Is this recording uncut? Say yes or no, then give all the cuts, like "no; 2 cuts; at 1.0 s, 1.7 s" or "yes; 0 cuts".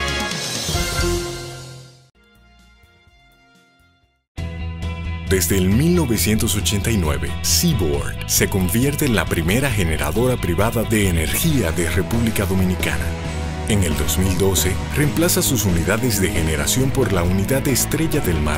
no; 1 cut; at 1.5 s